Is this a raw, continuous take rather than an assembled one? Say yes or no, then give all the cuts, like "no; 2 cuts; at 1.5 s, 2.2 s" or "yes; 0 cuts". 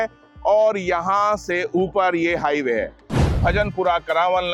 no; 1 cut; at 3.3 s